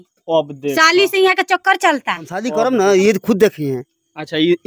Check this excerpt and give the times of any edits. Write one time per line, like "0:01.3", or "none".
0:02.4

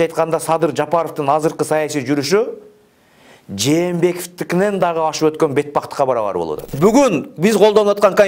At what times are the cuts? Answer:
0:06.7

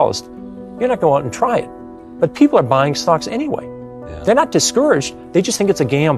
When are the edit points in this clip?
none

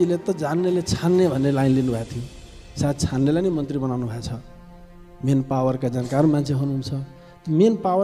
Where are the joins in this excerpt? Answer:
none

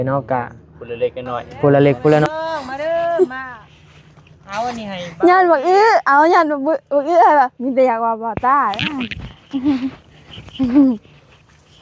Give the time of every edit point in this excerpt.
0:02.3

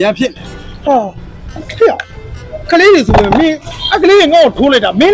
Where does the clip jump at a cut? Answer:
none

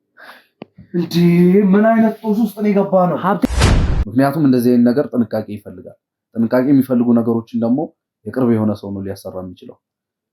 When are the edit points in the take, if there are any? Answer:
0:03.5

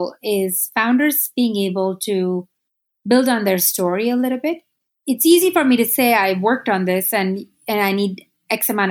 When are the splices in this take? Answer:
none

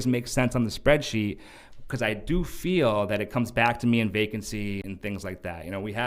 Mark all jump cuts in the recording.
0:04.8

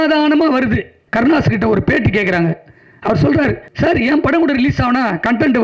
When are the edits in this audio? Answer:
0:01.0
0:03.7

